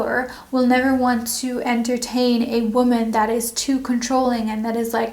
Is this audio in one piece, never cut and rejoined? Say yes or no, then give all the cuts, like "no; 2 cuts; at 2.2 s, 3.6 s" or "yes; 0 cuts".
yes; 0 cuts